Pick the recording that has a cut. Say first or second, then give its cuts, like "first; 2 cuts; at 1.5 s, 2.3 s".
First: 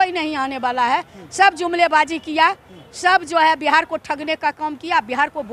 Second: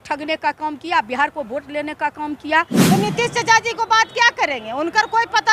second; 1 cut; at 2.8 s